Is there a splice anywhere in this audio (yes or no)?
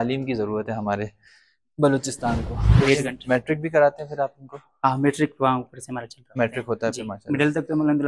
yes